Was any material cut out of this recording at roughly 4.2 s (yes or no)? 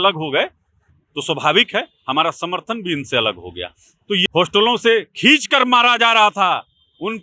yes